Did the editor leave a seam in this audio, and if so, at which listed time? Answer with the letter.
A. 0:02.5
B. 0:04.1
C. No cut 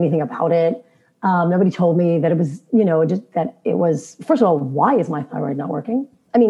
C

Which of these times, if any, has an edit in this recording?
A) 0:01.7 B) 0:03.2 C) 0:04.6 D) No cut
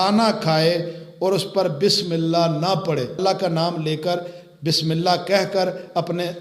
B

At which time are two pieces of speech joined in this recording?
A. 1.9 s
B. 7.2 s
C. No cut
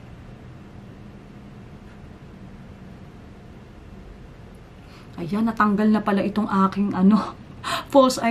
C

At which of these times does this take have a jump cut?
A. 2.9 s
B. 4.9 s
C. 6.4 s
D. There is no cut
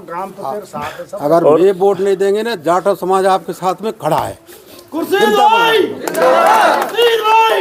D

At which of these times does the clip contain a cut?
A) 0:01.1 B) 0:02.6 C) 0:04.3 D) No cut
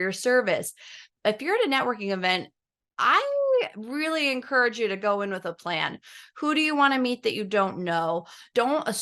A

